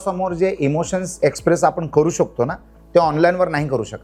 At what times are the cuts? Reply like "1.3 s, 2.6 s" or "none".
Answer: none